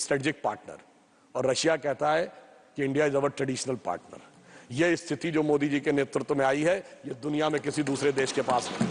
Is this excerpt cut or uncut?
uncut